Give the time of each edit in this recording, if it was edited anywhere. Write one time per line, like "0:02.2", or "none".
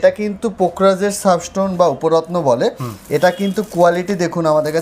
none